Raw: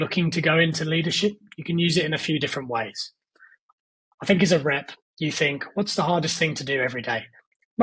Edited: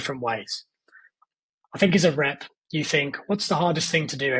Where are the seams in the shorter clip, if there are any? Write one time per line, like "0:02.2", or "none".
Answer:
none